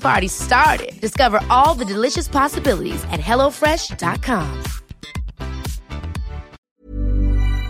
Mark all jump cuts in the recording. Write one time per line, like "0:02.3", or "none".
0:06.6